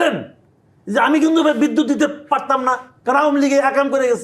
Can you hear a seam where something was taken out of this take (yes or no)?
yes